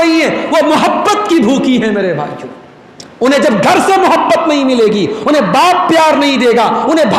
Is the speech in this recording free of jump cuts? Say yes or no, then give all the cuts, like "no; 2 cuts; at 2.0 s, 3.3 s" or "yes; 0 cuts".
yes; 0 cuts